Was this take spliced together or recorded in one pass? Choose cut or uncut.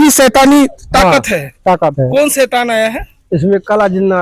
uncut